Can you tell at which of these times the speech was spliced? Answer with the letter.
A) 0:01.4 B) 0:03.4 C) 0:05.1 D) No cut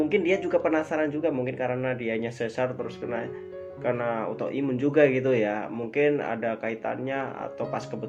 D